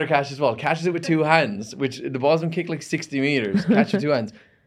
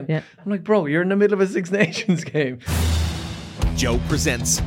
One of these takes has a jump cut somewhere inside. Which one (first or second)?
second